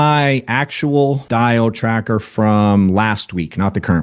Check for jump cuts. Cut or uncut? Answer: cut